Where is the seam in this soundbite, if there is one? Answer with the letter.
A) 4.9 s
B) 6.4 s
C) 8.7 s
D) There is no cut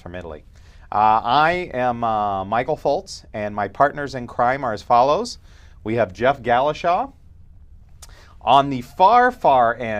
A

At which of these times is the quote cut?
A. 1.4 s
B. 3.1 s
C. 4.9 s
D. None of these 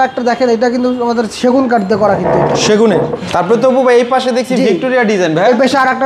B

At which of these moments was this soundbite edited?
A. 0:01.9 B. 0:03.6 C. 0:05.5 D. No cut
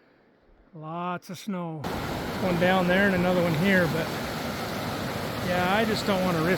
A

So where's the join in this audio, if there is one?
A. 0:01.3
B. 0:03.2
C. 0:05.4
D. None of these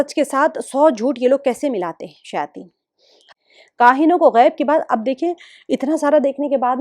B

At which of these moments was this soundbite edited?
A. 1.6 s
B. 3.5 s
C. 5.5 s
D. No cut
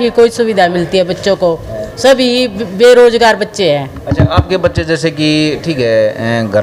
D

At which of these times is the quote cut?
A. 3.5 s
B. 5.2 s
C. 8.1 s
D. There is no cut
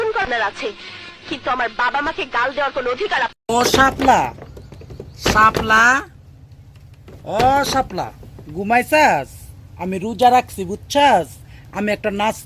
A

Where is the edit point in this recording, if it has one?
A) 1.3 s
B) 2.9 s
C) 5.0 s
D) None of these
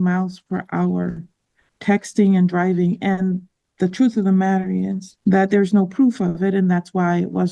C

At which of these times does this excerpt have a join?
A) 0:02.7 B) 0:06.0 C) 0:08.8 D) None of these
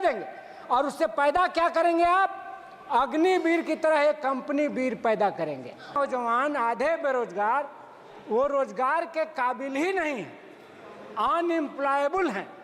B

